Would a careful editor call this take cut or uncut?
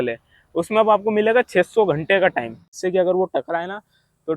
cut